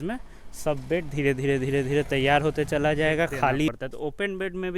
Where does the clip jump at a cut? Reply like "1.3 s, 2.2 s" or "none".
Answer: 3.7 s